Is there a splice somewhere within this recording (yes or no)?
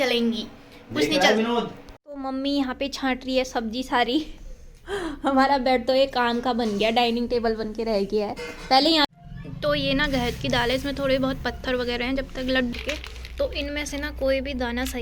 yes